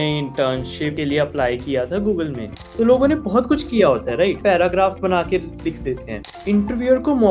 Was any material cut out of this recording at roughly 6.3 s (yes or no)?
yes